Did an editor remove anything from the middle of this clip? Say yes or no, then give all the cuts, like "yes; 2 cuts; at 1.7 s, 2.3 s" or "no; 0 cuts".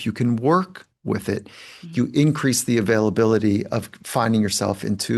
no; 0 cuts